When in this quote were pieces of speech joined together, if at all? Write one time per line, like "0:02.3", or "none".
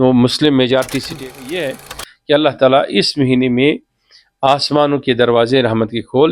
0:01.1